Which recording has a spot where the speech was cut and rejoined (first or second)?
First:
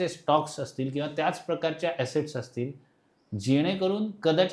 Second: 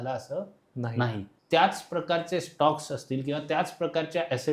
second